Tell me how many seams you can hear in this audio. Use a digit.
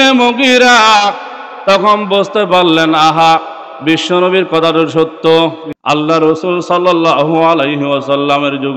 1